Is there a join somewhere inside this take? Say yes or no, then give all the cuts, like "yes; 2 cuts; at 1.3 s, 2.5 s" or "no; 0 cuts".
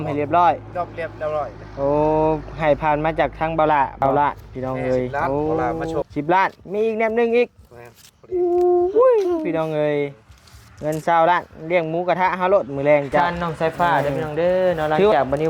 yes; 4 cuts; at 4.0 s, 5.3 s, 6.0 s, 13.3 s